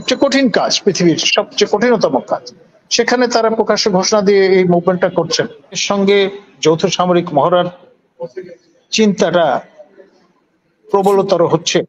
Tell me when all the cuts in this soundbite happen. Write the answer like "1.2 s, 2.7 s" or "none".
5.8 s

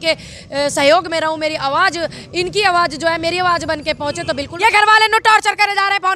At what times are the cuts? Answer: 4.5 s

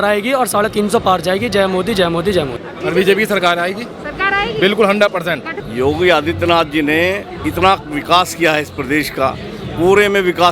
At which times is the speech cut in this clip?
2.6 s, 5.5 s

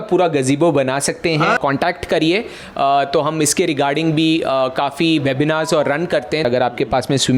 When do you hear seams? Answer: 1.6 s, 6.4 s

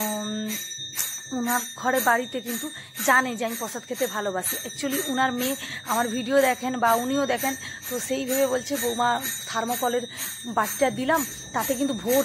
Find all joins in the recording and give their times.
none

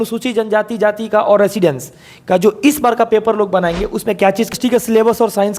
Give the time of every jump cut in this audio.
4.5 s

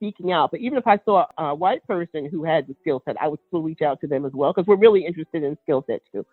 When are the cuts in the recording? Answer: none

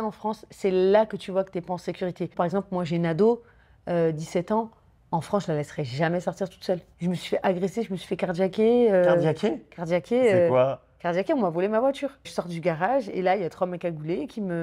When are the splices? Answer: 6.9 s, 12.3 s

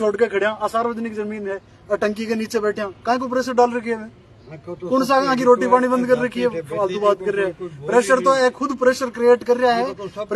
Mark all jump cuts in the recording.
none

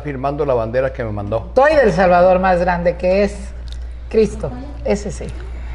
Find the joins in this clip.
1.5 s

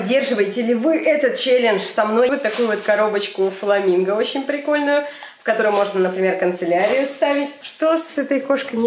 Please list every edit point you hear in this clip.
2.3 s, 7.6 s

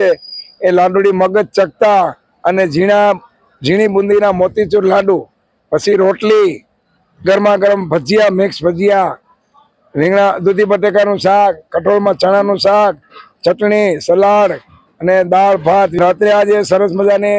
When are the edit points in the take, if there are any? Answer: 16.0 s

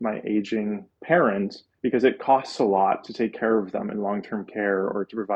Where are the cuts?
0.9 s, 1.6 s

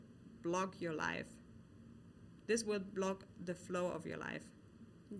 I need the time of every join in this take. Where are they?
none

